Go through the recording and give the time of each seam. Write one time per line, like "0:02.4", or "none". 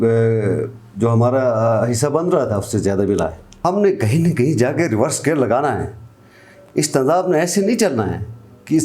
0:03.5